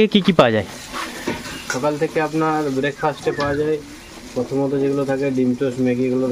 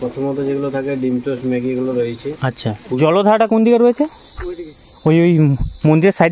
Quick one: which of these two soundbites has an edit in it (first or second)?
second